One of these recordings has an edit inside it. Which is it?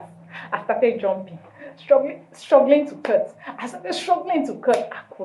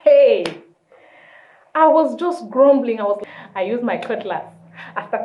second; 1 cut; at 3.2 s

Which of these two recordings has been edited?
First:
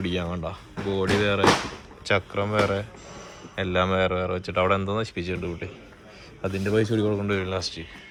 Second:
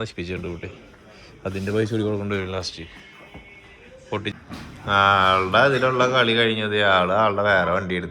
second; 1 cut; at 4.3 s

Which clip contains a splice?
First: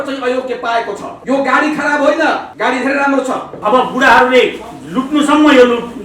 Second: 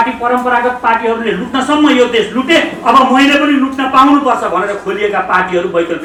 first; 3 cuts; at 1.1 s, 2.5 s, 3.5 s

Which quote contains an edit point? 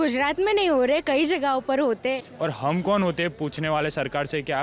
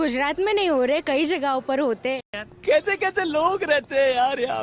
first; 1 cut; at 2.3 s

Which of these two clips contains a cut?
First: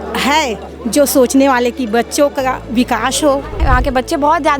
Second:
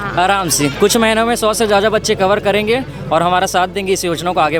first; 1 cut; at 3.6 s

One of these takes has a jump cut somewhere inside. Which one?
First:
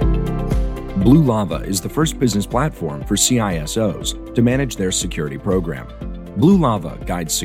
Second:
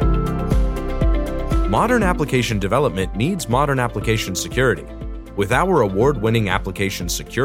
first; 1 cut; at 0.9 s

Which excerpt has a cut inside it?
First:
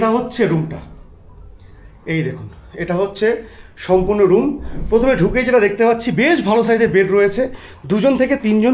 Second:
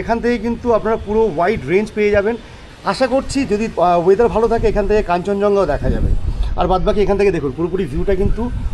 second; 1 cut; at 2.6 s

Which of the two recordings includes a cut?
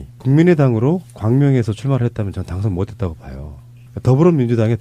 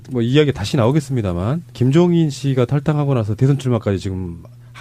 first; 1 cut; at 1.7 s

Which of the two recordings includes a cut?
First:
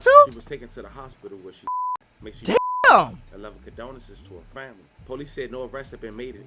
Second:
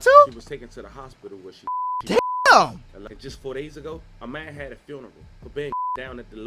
second; 2 cuts; at 2.0 s, 3.0 s

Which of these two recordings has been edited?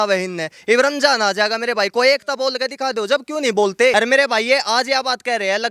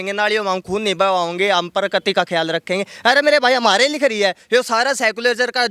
first; 1 cut; at 3.9 s

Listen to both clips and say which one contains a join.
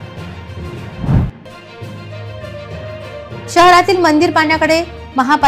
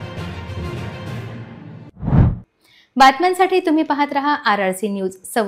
first; 2 cuts; at 0.9 s, 1.4 s

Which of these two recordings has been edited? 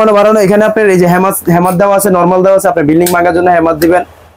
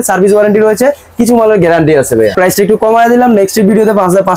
second; 1 cut; at 2.3 s

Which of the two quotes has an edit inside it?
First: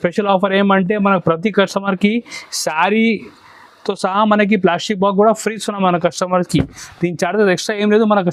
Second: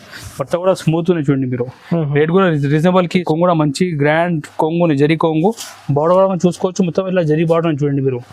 second; 1 cut; at 3.1 s

